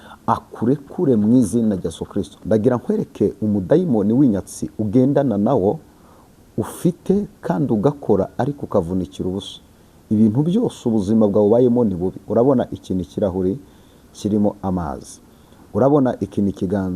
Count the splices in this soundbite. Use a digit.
1